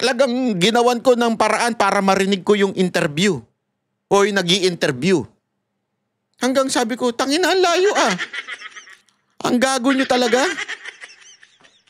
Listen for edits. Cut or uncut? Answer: uncut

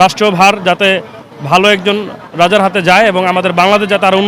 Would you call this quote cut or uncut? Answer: uncut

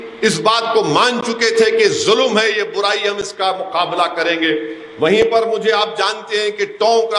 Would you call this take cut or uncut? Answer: uncut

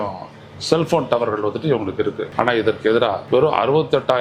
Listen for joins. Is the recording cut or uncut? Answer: cut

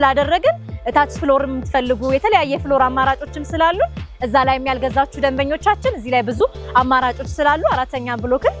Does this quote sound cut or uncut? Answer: uncut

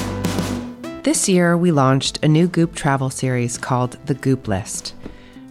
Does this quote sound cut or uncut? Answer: cut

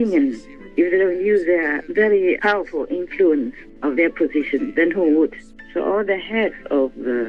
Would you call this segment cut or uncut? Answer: cut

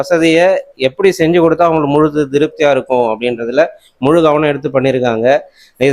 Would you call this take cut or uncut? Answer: uncut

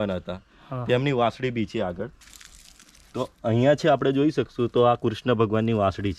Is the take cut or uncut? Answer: uncut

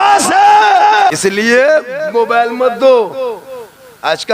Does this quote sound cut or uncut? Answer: cut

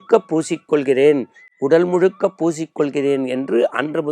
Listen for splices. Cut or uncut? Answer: uncut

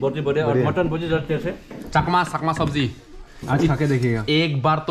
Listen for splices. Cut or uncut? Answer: cut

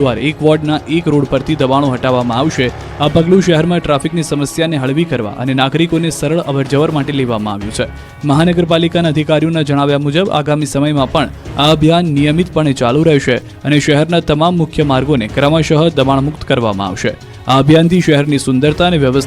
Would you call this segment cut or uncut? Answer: cut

